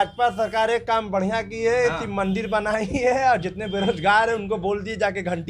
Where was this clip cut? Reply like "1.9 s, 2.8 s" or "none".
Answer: none